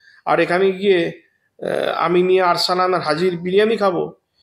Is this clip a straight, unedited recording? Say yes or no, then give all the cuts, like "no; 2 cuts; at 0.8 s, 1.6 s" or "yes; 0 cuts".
yes; 0 cuts